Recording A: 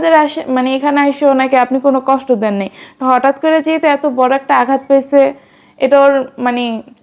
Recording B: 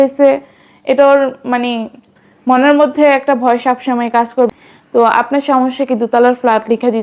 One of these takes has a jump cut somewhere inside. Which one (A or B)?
B